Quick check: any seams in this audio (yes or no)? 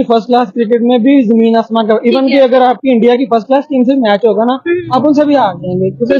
no